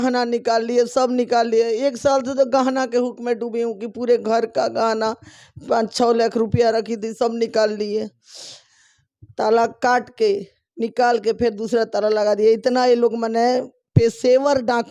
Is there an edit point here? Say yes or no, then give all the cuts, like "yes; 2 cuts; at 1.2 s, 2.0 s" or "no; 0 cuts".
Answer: no; 0 cuts